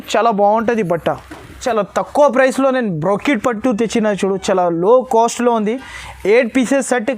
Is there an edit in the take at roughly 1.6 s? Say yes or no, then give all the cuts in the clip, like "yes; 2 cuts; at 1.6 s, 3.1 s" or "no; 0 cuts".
yes; 1 cut; at 1.6 s